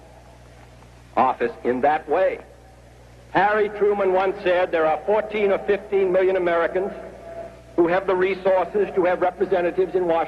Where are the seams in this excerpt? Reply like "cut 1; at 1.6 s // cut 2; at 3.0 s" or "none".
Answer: cut 1; at 4.9 s